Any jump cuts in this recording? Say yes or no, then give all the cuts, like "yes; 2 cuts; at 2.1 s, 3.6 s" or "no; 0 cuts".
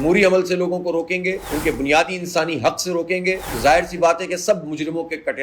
no; 0 cuts